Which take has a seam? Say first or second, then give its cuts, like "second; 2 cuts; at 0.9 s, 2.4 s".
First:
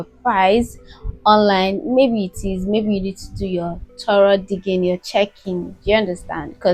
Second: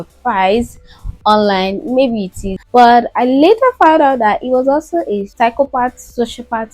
second; 2 cuts; at 2.5 s, 5.3 s